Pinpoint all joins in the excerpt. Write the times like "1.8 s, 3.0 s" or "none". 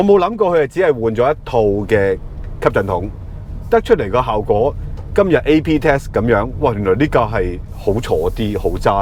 none